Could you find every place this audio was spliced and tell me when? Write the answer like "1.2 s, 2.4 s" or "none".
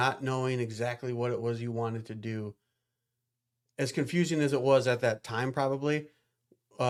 none

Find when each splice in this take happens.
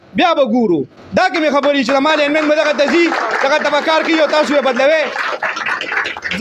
none

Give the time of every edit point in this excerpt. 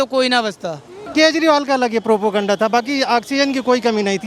1.0 s

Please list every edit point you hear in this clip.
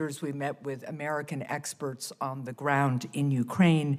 none

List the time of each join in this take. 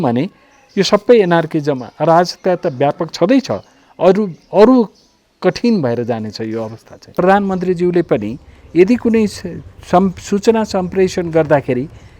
7.1 s

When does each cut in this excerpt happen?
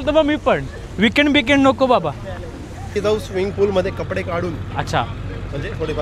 2.7 s

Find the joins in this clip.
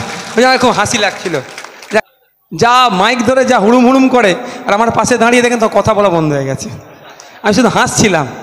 2.0 s

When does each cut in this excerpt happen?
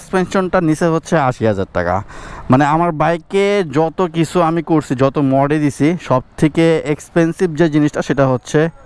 none

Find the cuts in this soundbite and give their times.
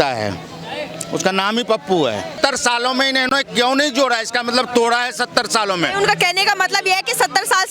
2.3 s

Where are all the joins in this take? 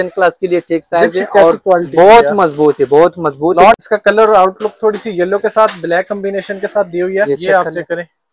3.7 s, 7.3 s

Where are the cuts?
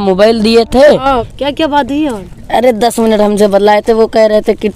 1.3 s

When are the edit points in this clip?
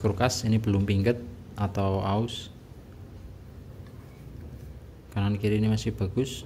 none

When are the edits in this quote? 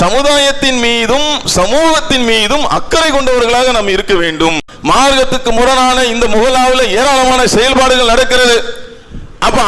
4.7 s

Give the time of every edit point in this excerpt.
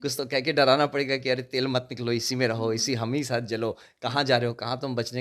none

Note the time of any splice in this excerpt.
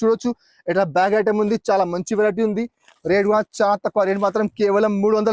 2.9 s

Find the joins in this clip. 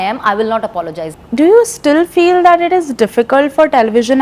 1.2 s

